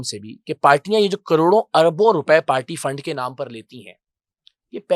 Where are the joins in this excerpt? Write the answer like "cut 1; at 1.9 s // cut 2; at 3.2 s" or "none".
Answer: none